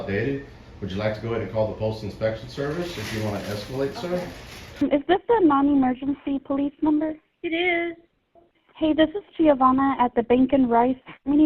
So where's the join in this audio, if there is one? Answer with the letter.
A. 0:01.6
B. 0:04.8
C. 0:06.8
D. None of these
B